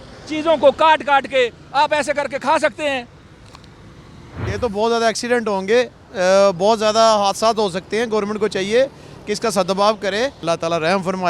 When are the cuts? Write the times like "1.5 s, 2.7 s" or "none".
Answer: 4.4 s, 10.4 s